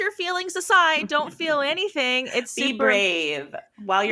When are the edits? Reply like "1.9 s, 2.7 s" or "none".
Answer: none